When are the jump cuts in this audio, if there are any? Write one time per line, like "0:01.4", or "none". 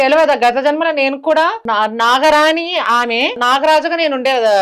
0:03.4